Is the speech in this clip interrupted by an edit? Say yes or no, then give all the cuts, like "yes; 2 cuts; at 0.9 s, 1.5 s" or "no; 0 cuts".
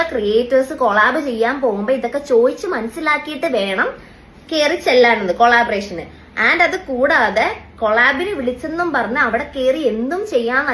no; 0 cuts